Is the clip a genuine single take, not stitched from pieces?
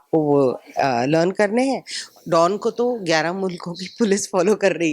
no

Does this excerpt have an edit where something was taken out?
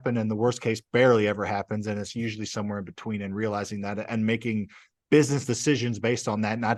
no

